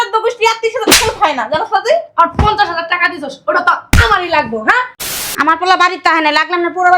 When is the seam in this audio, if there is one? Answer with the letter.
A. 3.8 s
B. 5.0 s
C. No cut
B